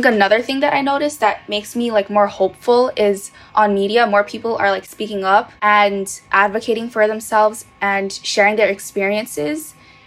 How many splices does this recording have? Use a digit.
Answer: 1